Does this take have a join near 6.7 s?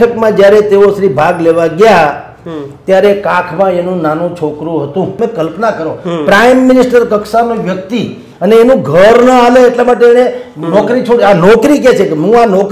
no; 1 cut; at 5.1 s

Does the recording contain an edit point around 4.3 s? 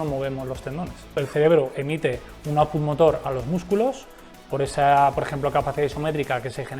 no; 1 cut; at 1.2 s

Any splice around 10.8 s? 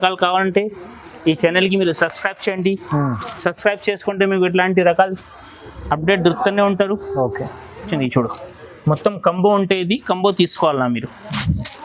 no; 1 cut; at 7.9 s

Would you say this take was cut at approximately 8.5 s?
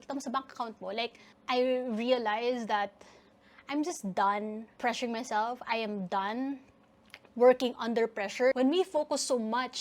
yes; 1 cut; at 8.5 s

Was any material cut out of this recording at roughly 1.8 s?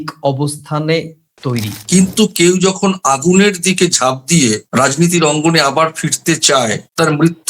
yes; 1 cut; at 1.8 s

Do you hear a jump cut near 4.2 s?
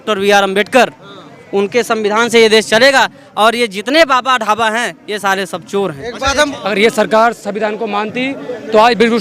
no; 1 cut; at 6.5 s

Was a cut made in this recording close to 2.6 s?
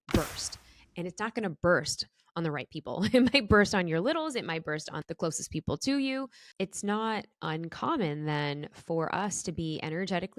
no; 2 cuts; at 5.0 s, 6.4 s

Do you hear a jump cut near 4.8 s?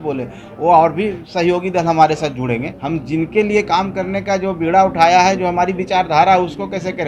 no; 1 cut; at 2.7 s

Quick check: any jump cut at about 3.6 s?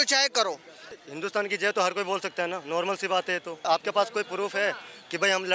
yes; 2 cuts; at 1.0 s, 3.6 s

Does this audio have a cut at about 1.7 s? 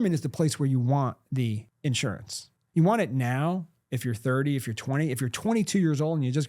yes; 1 cut; at 1.7 s

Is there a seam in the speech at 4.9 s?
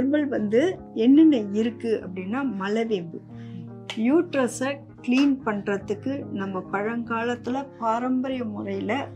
yes; 1 cut; at 4.9 s

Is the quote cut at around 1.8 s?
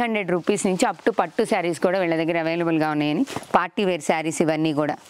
no; 1 cut; at 3.2 s

